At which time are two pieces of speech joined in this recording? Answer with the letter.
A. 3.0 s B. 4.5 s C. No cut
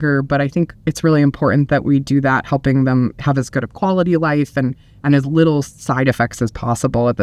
C